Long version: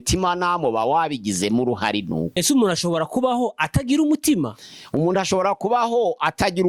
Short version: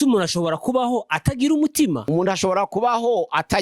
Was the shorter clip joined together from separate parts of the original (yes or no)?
yes